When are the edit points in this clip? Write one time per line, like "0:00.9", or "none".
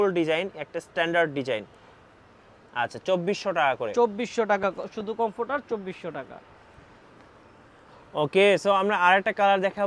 none